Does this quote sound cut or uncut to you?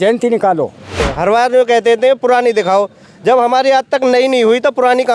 cut